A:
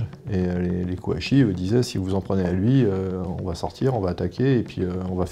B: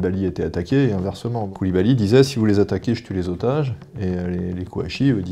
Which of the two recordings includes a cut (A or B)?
B